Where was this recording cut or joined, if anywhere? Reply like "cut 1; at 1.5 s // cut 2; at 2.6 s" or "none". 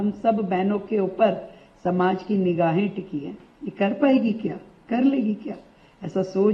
none